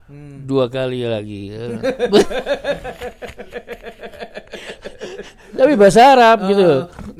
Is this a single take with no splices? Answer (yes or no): yes